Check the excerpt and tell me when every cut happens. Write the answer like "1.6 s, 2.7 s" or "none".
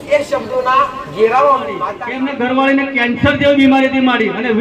2.0 s